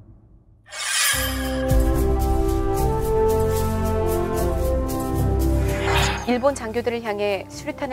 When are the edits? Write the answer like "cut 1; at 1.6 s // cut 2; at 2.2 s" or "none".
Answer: cut 1; at 5.2 s

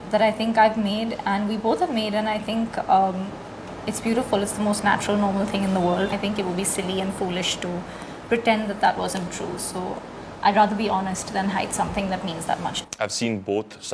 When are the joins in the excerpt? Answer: cut 1; at 6.1 s // cut 2; at 12.8 s

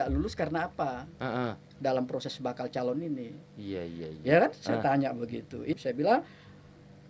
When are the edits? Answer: cut 1; at 5.8 s

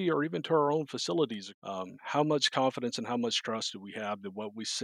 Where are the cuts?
cut 1; at 1.5 s

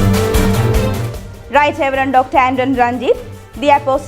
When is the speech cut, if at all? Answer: cut 1; at 1.0 s

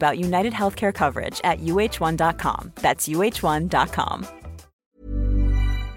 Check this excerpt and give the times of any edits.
cut 1; at 4.7 s

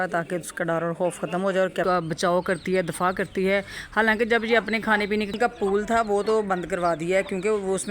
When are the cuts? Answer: cut 1; at 1.8 s // cut 2; at 5.3 s

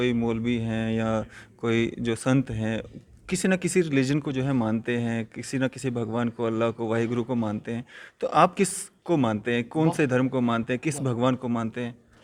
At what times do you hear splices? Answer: none

